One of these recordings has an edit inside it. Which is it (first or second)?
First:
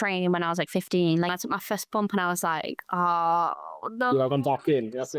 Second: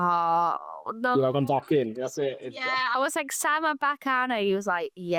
first